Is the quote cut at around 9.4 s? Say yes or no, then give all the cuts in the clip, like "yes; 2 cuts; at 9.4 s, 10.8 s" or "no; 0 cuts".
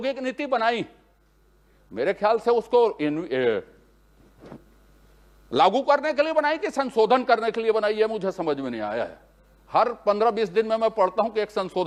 no; 0 cuts